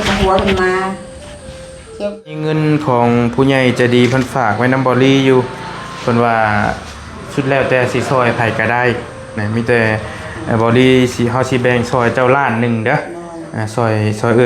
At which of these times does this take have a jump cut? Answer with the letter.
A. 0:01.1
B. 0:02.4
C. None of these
B